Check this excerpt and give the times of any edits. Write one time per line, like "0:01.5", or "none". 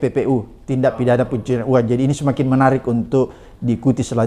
none